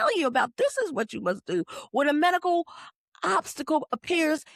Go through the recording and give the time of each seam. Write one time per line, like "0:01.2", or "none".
none